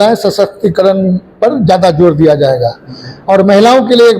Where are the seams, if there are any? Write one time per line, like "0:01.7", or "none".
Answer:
none